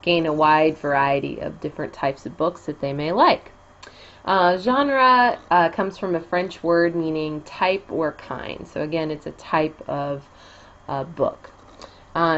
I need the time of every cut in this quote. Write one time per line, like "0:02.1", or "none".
none